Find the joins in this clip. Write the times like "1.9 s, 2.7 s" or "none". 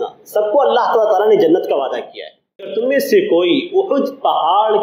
2.7 s